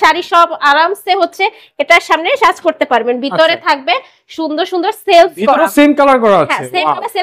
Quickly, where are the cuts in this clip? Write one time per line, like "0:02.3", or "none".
none

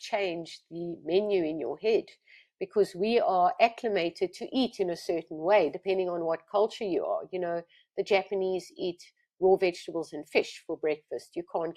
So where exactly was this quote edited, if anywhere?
none

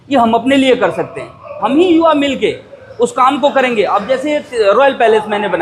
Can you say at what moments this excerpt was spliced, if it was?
0:01.6

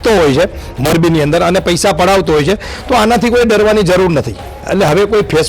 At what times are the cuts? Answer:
0:04.5

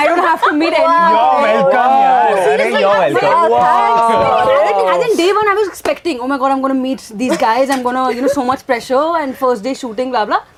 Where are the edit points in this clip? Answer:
none

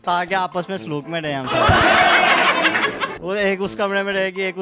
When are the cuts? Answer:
0:01.5
0:03.0

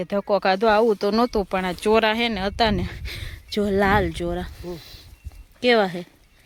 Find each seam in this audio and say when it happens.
none

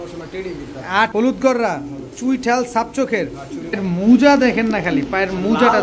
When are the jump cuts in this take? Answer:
0:01.1
0:03.8

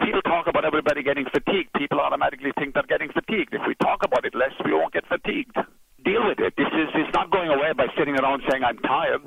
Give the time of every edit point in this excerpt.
0:06.0

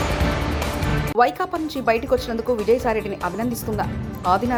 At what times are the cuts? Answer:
none

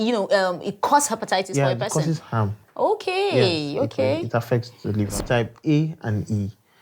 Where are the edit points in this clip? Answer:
0:05.1

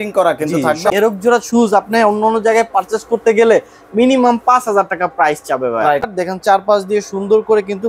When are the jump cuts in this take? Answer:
0:00.9
0:06.1

